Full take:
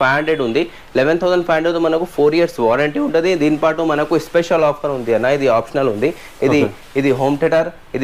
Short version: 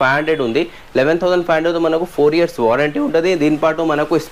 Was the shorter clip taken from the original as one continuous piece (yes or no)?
yes